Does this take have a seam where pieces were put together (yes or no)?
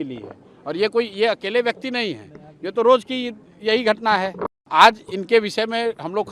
yes